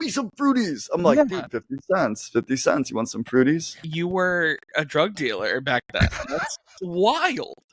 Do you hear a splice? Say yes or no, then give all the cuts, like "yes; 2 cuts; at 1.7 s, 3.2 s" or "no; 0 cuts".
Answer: yes; 1 cut; at 3.8 s